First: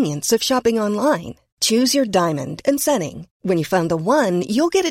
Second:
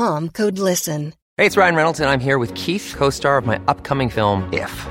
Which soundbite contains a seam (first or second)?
second